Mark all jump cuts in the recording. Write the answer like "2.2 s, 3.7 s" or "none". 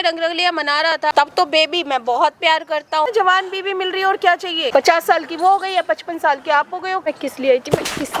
1.1 s, 3.1 s, 4.7 s, 7.0 s